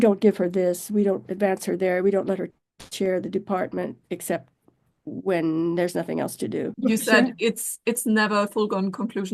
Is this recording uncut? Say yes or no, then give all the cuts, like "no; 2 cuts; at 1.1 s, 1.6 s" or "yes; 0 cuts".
no; 1 cut; at 6.7 s